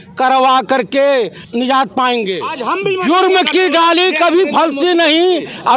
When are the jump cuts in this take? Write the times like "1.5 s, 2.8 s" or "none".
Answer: 1.4 s, 2.5 s